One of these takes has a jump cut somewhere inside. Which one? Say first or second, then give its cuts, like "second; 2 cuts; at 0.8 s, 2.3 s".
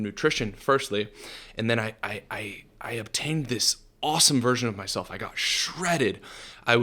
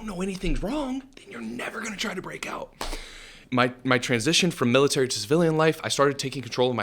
second; 1 cut; at 3.3 s